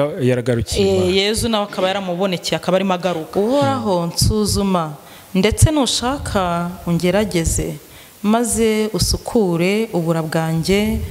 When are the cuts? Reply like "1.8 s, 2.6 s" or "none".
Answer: 3.2 s

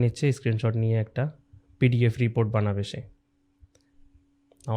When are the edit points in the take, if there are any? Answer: none

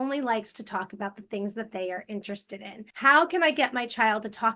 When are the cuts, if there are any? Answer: 2.8 s

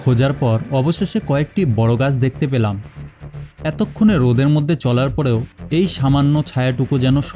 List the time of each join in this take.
none

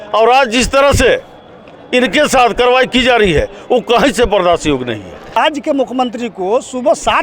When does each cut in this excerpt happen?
5.4 s

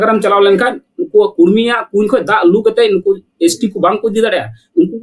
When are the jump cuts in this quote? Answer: none

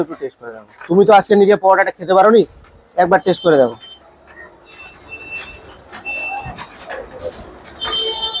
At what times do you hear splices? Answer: none

